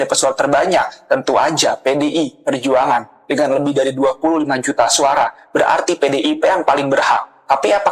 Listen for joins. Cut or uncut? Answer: uncut